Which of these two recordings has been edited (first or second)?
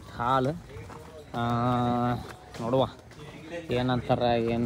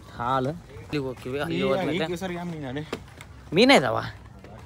second